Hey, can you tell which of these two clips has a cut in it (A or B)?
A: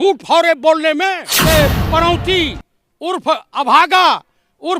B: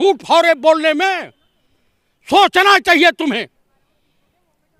A